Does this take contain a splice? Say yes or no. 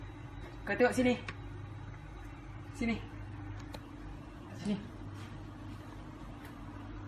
no